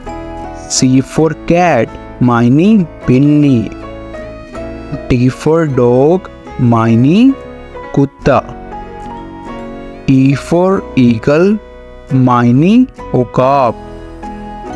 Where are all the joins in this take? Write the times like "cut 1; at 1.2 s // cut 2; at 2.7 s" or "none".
cut 1; at 3.7 s // cut 2; at 5.1 s // cut 3; at 8.5 s // cut 4; at 10.1 s